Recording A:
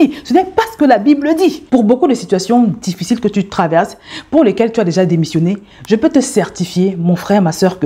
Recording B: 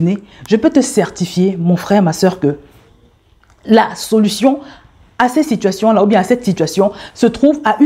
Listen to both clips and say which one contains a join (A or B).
A